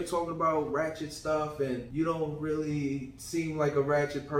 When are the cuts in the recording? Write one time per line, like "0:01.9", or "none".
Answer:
0:01.9

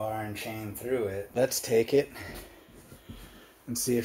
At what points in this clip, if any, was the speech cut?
0:01.2

